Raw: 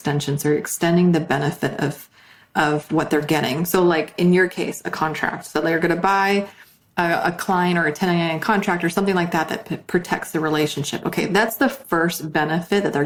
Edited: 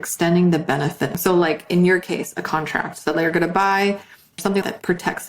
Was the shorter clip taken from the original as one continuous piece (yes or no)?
no